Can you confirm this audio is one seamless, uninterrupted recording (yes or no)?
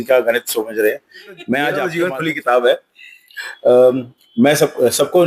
no